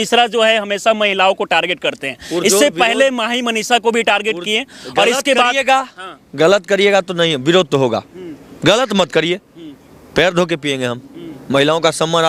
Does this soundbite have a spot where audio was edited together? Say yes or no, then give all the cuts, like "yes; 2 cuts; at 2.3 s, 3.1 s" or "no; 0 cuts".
no; 0 cuts